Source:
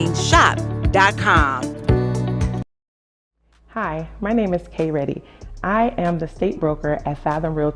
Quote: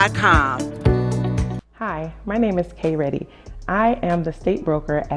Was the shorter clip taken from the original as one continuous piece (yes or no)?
no